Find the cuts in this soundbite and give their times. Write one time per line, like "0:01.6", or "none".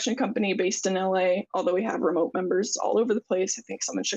none